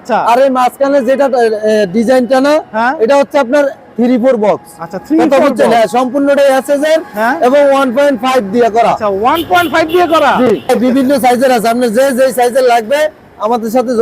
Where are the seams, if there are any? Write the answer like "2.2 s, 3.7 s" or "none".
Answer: 10.7 s